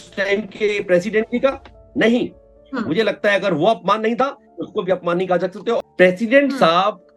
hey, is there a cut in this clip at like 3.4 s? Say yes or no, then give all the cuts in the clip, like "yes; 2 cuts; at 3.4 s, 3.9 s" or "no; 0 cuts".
no; 1 cut; at 5.8 s